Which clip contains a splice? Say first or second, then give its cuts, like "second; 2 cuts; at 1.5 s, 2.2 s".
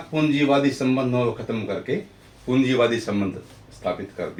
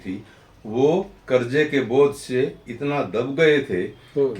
second; 1 cut; at 1.2 s